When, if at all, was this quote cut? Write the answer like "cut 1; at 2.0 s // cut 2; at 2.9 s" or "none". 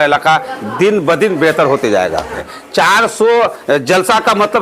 cut 1; at 2.5 s

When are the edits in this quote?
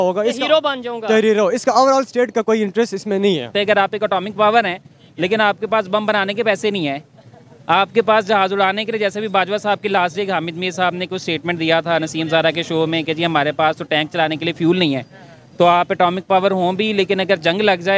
cut 1; at 3.5 s

